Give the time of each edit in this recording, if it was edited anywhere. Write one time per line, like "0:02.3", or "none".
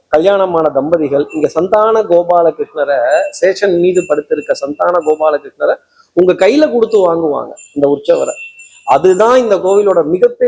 none